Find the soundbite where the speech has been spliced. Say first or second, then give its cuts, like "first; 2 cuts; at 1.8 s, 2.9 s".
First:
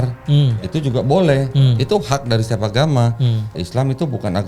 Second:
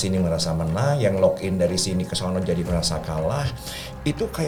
first; 1 cut; at 3.6 s